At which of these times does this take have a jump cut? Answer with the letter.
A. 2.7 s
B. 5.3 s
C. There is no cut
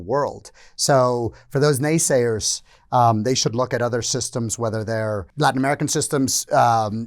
B